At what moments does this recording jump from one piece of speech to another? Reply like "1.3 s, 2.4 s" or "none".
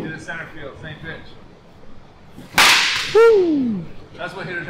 1.4 s